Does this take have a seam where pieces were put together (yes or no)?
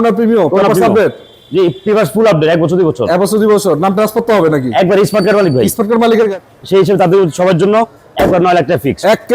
yes